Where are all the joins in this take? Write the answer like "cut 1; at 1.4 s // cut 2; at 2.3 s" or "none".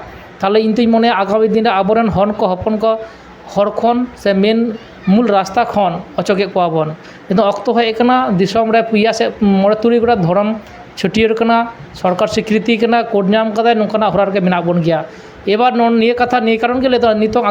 none